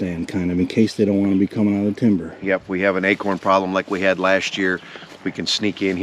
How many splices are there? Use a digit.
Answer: 0